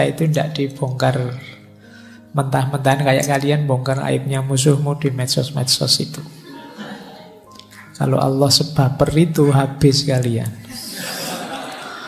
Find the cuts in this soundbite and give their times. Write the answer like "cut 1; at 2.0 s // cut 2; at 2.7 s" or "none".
none